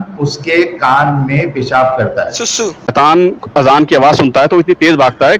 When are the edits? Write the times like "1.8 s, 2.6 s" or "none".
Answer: 2.9 s